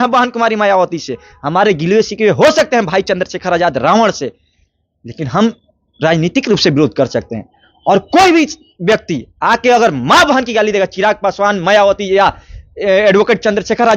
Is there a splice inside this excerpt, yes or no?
no